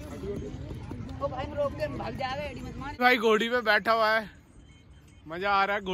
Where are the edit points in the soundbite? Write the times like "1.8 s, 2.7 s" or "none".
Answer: 2.9 s